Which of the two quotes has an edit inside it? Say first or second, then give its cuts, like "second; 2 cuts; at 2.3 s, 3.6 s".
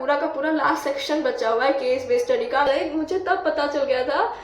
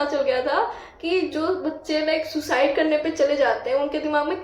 first; 1 cut; at 2.7 s